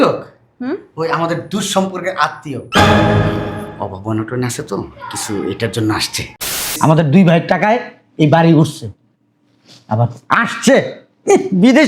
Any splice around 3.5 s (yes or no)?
no